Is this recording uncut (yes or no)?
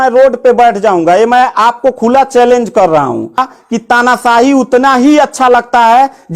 no